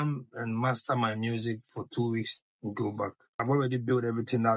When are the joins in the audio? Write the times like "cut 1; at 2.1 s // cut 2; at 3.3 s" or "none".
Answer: cut 1; at 3.4 s